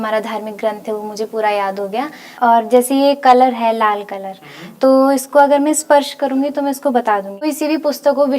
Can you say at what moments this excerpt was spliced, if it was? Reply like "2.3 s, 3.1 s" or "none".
2.2 s, 7.5 s